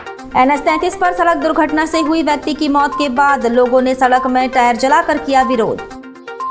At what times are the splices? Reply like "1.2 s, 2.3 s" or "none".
none